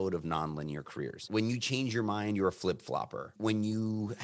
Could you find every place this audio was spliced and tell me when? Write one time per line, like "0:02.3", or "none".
0:01.2
0:03.4